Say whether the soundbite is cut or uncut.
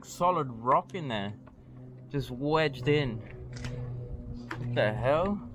uncut